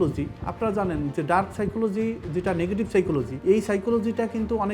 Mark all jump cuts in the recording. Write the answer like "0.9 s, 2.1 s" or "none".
3.3 s